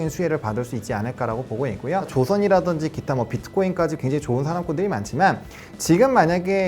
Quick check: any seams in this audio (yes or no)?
yes